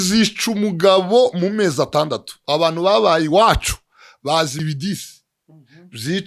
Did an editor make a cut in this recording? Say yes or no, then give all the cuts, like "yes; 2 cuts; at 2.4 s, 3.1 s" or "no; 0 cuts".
yes; 1 cut; at 4.6 s